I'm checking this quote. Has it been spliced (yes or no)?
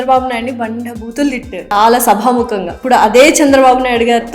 yes